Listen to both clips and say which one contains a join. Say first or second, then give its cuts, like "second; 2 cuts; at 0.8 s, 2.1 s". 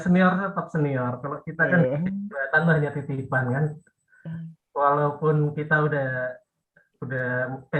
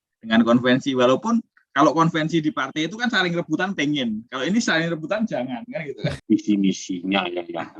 second; 1 cut; at 6.2 s